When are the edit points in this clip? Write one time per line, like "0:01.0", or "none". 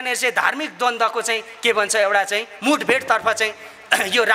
none